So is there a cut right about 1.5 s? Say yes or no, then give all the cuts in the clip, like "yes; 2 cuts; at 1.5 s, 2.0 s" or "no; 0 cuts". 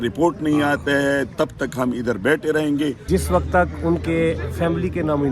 no; 1 cut; at 3.0 s